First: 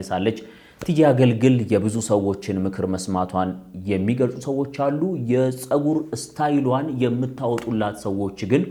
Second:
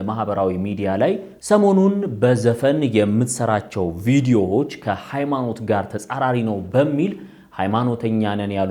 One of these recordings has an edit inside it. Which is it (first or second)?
second